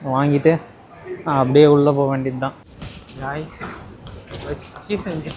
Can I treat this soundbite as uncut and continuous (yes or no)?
no